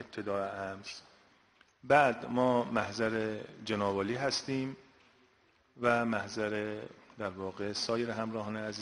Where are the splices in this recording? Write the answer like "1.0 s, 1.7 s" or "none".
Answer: none